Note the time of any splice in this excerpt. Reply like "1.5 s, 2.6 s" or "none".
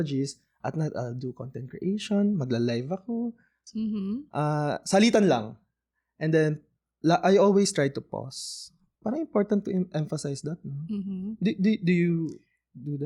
3.5 s